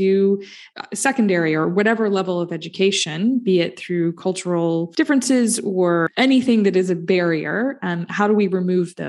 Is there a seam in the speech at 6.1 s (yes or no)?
yes